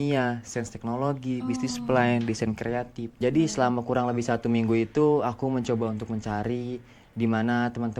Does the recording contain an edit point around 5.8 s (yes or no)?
no